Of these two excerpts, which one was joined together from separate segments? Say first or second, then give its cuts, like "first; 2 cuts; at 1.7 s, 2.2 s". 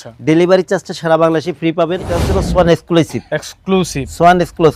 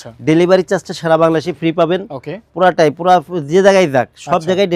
first; 1 cut; at 2.4 s